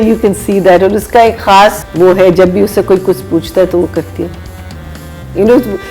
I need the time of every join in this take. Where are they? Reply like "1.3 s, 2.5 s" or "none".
1.8 s

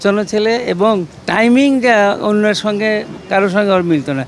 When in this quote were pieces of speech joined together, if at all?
1.2 s, 3.1 s

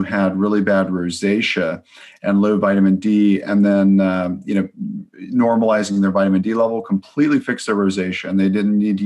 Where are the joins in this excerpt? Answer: none

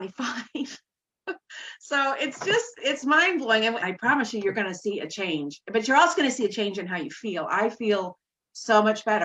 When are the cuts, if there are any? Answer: 3.8 s

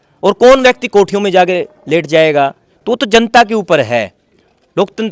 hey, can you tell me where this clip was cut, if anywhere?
none

